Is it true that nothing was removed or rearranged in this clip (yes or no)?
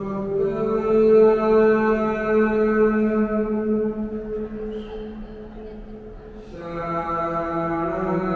yes